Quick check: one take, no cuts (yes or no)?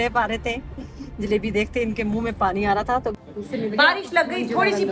no